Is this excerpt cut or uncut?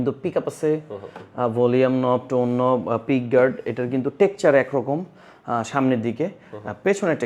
uncut